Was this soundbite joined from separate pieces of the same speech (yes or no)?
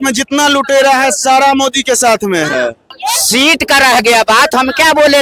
yes